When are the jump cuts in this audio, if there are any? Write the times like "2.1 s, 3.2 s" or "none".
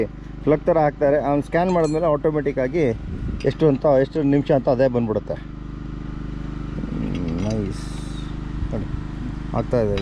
none